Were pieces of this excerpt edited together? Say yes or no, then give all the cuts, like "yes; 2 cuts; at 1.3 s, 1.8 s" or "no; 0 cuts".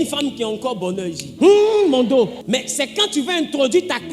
yes; 2 cuts; at 1.2 s, 2.4 s